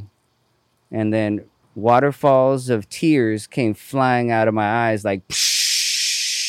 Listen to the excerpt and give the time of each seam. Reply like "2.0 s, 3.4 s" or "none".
1.6 s